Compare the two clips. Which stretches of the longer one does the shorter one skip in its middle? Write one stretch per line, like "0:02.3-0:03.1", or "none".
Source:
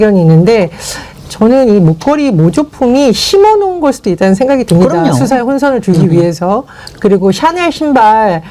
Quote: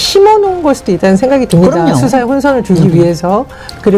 none